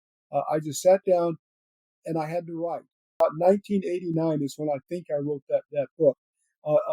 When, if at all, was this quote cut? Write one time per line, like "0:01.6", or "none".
0:03.2